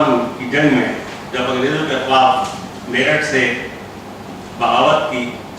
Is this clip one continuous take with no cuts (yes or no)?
no